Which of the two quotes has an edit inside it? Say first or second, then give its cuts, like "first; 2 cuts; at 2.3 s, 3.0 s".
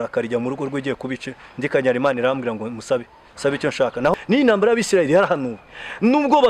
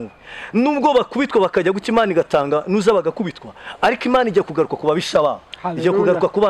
first; 1 cut; at 4.1 s